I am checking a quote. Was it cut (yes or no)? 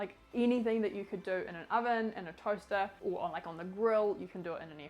yes